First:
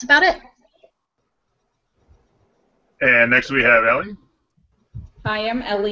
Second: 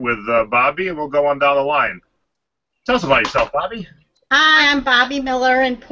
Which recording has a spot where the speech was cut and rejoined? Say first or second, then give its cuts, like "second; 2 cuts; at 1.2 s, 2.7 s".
first; 1 cut; at 3.4 s